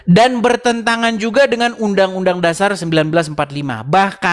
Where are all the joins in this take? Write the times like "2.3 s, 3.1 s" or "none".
none